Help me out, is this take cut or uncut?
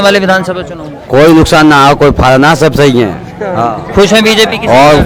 uncut